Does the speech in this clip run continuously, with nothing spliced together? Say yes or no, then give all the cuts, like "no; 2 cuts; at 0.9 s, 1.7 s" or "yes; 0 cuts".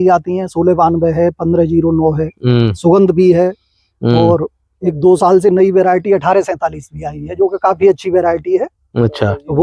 yes; 0 cuts